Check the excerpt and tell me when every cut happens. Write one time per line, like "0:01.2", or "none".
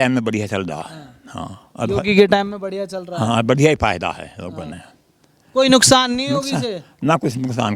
none